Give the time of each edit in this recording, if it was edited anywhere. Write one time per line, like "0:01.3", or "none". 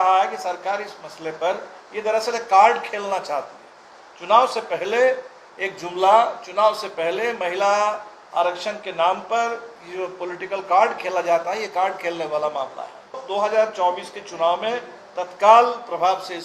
0:13.2